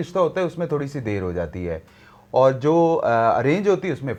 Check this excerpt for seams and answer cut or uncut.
uncut